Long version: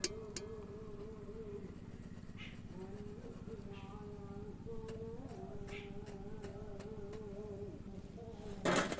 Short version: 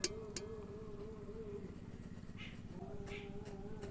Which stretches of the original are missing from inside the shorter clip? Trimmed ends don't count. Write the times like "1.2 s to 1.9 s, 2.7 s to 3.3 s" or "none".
2.8 s to 5.4 s